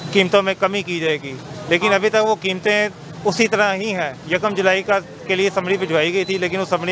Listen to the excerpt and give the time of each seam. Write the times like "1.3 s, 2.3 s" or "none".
none